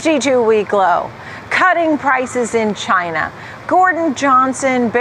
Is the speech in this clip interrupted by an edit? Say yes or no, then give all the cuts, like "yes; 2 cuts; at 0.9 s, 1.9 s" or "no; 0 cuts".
no; 0 cuts